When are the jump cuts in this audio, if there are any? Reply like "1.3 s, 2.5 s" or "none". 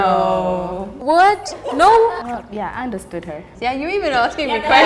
2.2 s, 3.5 s